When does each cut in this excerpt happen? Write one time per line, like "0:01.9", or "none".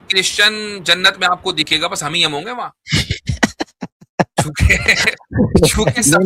none